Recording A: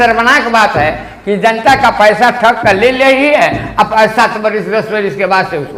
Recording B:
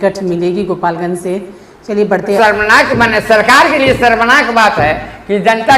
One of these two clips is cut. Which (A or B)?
B